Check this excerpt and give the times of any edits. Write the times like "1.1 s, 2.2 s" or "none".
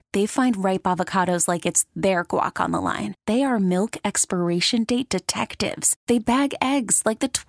none